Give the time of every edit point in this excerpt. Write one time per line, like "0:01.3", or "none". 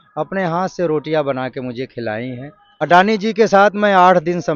0:02.8